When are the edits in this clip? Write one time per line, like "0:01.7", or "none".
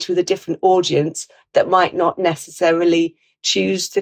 none